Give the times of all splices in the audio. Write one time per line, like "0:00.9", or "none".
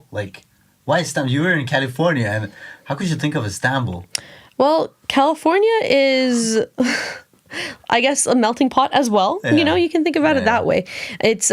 none